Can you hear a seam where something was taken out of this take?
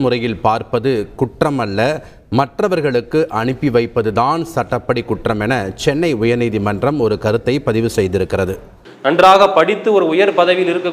yes; 1 cut; at 8.9 s

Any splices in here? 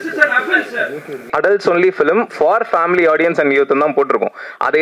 yes; 1 cut; at 1.3 s

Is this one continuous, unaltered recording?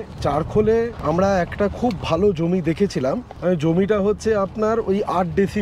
no; 2 cuts; at 1.0 s, 3.3 s

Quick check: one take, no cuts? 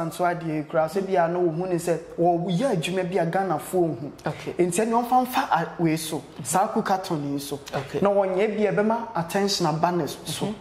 yes; 0 cuts

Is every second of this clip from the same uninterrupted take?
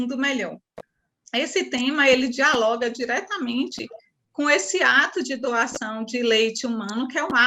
yes; 0 cuts

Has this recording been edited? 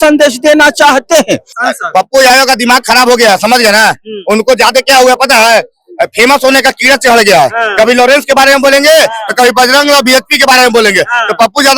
yes; 1 cut; at 1.5 s

